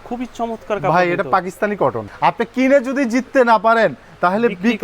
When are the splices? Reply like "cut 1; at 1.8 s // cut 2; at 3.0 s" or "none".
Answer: cut 1; at 2.1 s